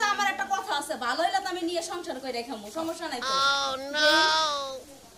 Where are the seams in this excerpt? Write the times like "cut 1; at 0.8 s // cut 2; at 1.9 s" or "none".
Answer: none